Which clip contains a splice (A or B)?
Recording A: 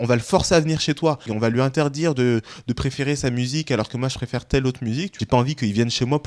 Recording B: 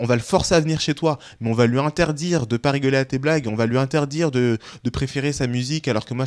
A